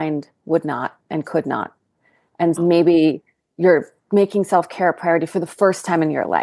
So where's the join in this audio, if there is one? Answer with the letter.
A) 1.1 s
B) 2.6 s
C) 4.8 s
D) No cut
B